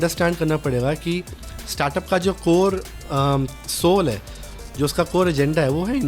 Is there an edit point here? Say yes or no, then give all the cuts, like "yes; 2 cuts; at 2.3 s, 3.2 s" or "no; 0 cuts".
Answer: no; 0 cuts